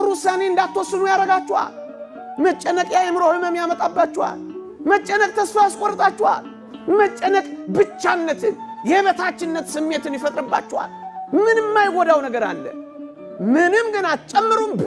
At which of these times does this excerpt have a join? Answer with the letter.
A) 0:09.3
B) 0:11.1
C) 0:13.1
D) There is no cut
D